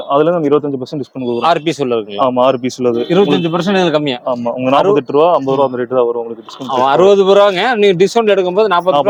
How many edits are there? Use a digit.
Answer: 0